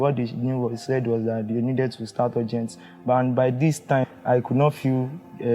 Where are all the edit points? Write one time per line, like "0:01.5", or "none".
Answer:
0:04.1